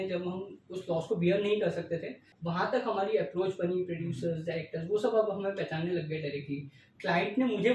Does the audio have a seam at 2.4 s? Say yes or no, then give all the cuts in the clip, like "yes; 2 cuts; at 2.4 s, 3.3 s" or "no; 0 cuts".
yes; 2 cuts; at 2.4 s, 6.9 s